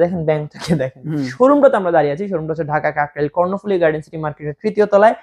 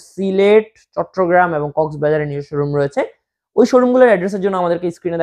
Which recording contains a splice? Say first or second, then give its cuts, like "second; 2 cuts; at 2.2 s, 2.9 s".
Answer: first; 1 cut; at 1.3 s